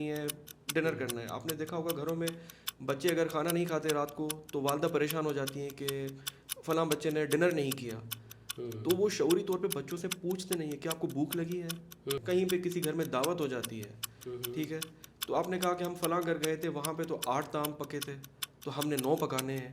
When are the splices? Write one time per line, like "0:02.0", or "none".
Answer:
0:12.2